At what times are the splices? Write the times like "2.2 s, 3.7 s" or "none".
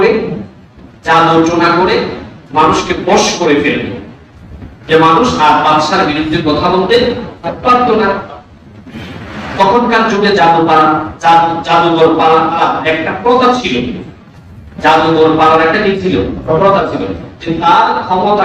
12.6 s